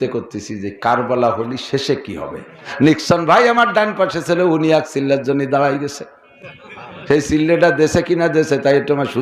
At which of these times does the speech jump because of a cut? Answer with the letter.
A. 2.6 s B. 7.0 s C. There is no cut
A